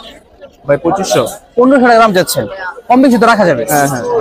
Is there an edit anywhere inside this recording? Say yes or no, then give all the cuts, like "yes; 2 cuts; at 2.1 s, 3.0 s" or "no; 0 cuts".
no; 0 cuts